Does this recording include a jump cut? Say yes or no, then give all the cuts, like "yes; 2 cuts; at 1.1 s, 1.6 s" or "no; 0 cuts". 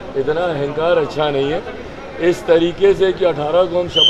no; 0 cuts